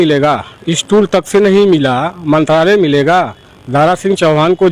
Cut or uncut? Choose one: uncut